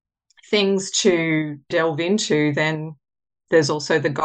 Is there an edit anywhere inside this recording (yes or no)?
yes